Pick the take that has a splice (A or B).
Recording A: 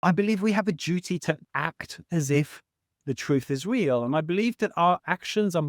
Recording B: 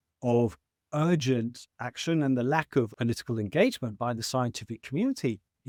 A